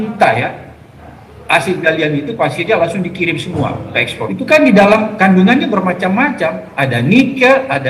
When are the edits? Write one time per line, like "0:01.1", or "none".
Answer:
0:04.3